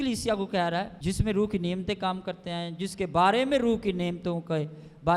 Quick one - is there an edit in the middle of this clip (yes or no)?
yes